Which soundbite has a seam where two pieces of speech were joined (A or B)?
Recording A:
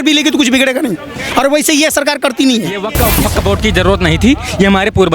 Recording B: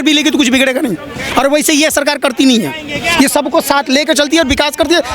A